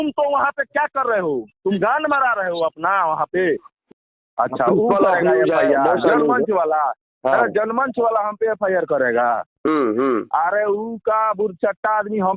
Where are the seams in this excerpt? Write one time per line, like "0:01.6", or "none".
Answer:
0:03.7